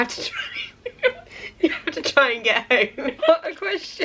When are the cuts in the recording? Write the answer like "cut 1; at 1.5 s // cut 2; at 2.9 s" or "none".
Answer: cut 1; at 3.2 s